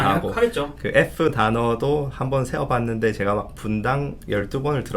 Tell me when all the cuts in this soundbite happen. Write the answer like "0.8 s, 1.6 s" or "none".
none